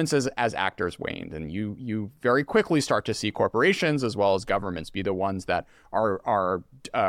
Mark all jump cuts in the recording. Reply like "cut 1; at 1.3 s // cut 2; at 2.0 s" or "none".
none